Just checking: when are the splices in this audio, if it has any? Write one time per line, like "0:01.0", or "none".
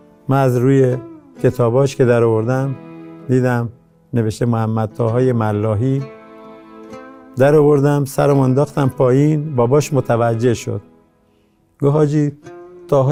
none